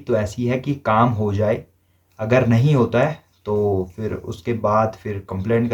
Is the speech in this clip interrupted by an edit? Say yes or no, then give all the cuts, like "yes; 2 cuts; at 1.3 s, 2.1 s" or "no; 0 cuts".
no; 0 cuts